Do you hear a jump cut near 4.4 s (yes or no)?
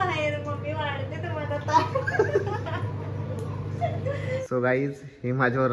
yes